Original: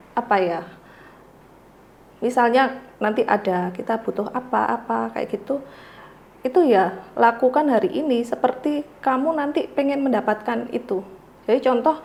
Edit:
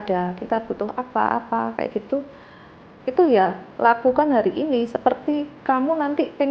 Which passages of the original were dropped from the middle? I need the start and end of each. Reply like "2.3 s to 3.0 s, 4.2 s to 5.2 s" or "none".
none